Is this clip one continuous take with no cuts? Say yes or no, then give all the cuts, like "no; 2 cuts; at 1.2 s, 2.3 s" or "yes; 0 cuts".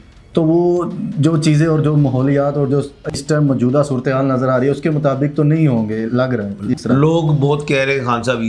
yes; 0 cuts